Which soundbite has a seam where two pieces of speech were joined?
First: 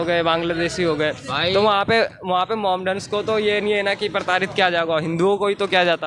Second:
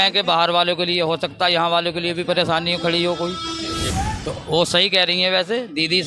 second; 1 cut; at 3.9 s

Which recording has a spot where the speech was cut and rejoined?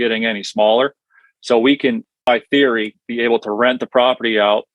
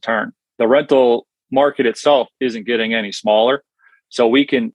second; 1 cut; at 1.3 s

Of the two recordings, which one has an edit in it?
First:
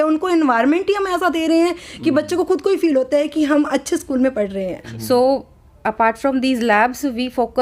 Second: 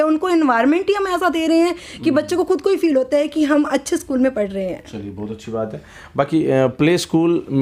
first; 1 cut; at 4.9 s

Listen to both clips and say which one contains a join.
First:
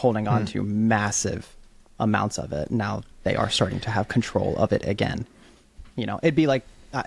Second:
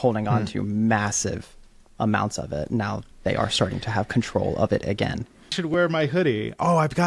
second; 1 cut; at 5.6 s

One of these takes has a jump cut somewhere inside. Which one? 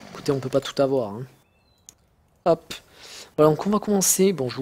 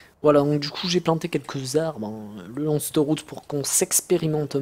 second; 1 cut; at 1.8 s

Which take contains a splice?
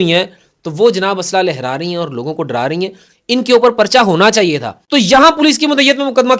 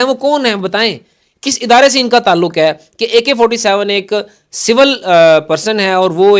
first; 1 cut; at 4.7 s

